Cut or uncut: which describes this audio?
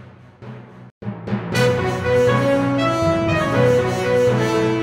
cut